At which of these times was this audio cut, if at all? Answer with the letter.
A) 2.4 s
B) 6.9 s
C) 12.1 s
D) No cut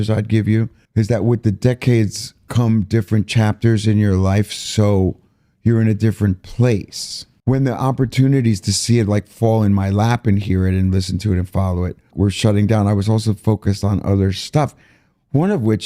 C